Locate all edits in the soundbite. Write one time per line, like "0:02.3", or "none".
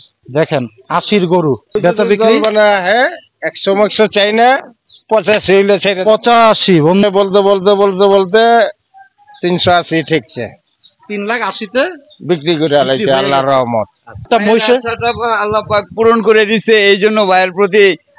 0:01.6
0:07.0
0:14.2